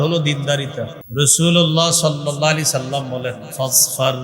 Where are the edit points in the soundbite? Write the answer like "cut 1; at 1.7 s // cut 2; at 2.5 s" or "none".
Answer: cut 1; at 1.0 s